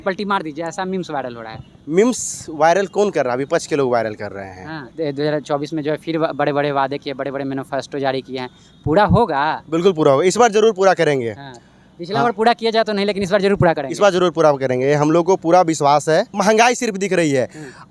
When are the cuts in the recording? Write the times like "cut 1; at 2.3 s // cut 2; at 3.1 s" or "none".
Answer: cut 1; at 4.8 s // cut 2; at 16.3 s